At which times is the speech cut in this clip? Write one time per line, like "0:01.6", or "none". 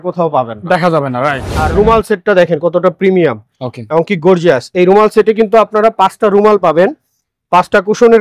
0:01.5